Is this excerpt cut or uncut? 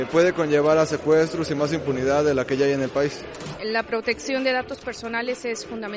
uncut